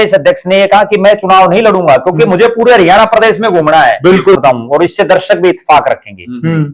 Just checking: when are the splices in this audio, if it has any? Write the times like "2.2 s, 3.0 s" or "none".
4.4 s